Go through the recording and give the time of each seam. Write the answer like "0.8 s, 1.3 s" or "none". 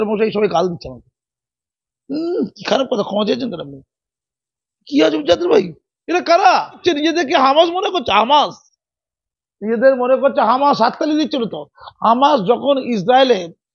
6.8 s

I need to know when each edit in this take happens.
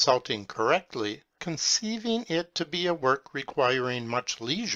none

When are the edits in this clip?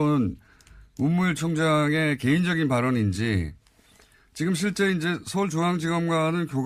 5.5 s

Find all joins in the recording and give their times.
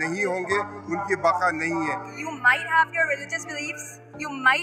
2.1 s

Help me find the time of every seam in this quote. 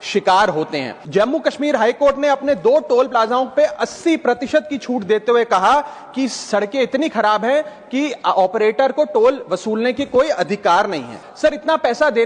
0.9 s, 11.2 s

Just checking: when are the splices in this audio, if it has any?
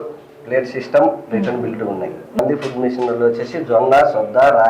2.4 s

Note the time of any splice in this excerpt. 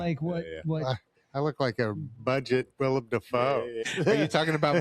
3.8 s

